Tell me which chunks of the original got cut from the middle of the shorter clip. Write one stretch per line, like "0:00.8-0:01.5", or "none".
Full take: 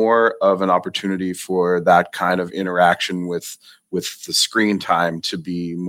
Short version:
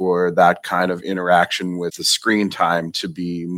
0:03.6-0:04.4